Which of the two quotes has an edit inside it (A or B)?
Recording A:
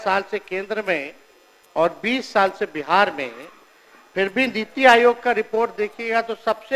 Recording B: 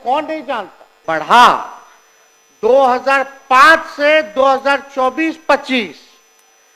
B